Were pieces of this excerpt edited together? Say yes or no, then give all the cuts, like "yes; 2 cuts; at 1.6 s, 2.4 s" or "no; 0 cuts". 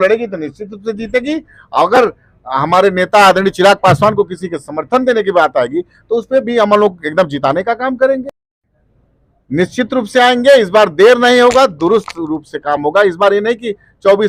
no; 0 cuts